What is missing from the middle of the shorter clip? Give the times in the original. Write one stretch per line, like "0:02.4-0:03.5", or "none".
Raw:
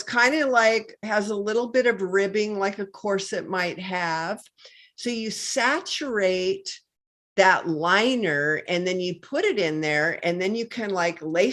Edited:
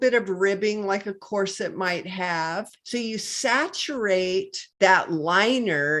0:04.5-0:04.9
0:06.7-0:07.2